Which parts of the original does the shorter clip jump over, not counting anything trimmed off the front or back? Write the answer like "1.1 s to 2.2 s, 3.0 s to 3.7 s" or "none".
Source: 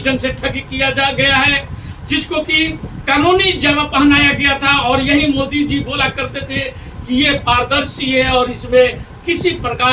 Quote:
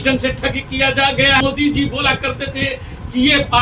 1.4 s to 5.3 s